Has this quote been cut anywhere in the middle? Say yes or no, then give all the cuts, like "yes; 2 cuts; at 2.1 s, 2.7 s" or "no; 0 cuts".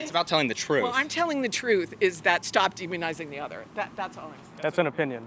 no; 0 cuts